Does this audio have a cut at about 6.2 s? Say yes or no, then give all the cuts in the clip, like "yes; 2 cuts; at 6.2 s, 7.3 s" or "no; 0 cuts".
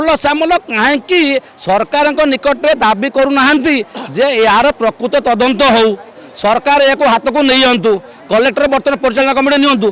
no; 0 cuts